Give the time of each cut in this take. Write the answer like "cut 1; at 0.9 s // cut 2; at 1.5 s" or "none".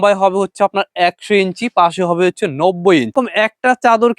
cut 1; at 3.1 s